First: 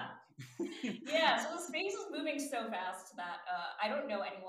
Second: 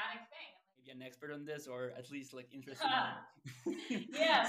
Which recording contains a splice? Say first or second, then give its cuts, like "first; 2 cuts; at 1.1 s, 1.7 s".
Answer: second; 1 cut; at 1.0 s